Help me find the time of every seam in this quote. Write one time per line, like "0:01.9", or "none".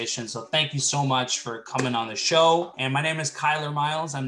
0:02.8